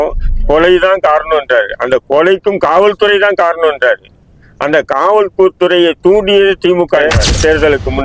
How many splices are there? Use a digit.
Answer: 1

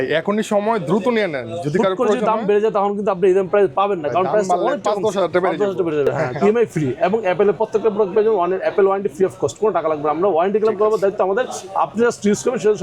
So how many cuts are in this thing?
1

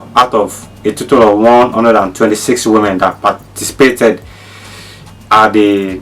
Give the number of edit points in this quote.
0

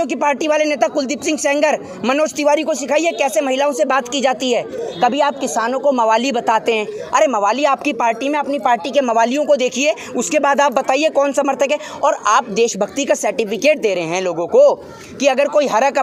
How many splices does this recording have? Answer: 0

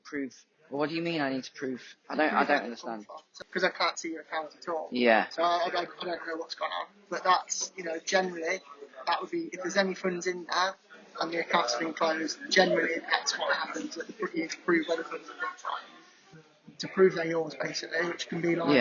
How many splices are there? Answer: 1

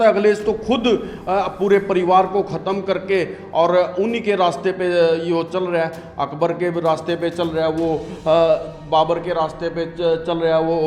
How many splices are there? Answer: 0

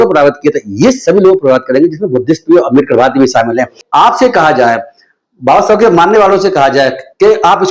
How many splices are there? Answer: 1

